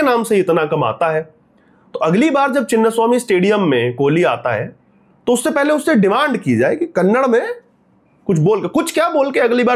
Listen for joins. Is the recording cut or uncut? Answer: uncut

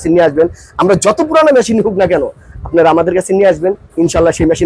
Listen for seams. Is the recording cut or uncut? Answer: uncut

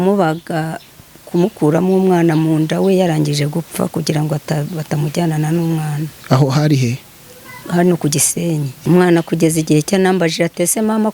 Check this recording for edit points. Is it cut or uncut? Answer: cut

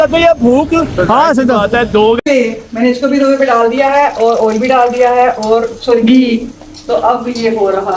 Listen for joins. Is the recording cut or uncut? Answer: cut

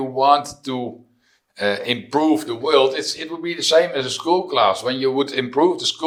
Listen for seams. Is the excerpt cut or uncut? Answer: uncut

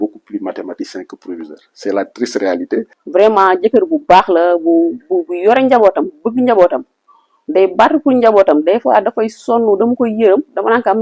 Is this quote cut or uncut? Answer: cut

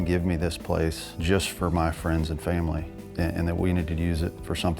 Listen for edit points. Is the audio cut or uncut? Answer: cut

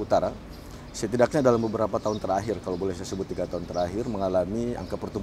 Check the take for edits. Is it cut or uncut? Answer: uncut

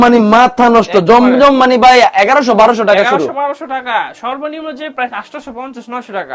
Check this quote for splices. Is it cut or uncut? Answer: uncut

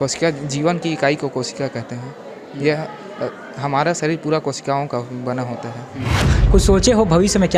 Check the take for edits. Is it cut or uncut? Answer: cut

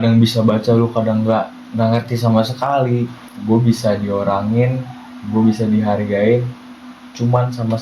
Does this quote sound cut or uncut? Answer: cut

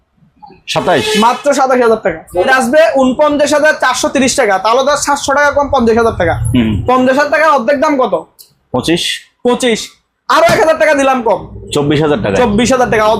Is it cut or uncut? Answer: cut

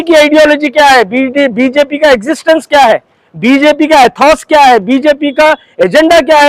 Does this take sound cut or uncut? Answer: uncut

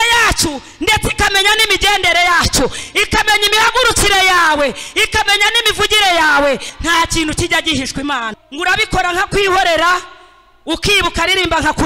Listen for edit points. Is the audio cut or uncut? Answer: cut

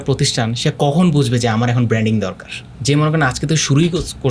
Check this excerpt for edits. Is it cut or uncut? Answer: cut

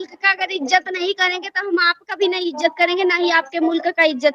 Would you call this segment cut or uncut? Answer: uncut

